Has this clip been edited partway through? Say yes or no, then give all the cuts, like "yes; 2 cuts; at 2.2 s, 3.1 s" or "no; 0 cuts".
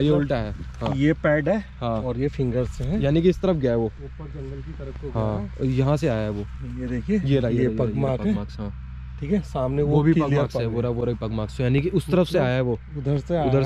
no; 0 cuts